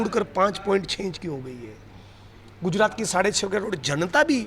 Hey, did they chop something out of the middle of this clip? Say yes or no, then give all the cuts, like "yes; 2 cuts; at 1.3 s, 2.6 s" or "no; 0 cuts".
no; 0 cuts